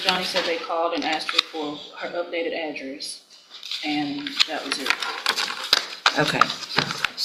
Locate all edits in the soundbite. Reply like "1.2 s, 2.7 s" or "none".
none